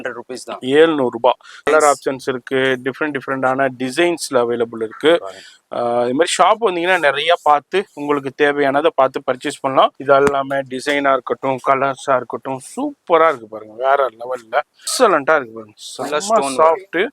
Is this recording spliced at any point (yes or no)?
yes